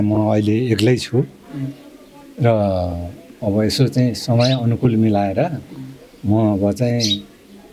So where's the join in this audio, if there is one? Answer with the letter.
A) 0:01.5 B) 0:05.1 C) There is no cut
C